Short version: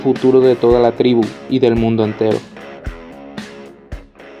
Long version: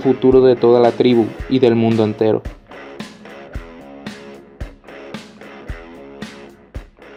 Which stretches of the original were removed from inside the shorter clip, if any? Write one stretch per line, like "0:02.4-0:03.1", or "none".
0:02.4-0:03.1